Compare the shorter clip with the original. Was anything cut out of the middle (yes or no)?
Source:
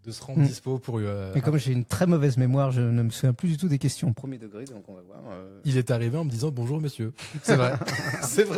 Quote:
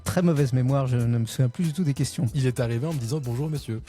yes